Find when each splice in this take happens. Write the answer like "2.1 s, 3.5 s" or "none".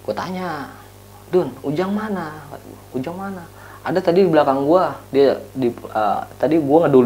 none